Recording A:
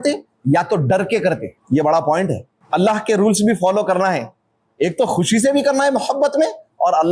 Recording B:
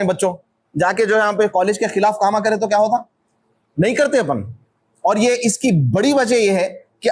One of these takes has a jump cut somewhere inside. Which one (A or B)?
A